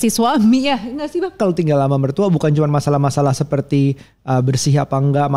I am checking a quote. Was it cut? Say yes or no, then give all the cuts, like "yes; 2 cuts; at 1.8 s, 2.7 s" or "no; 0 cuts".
yes; 1 cut; at 1.4 s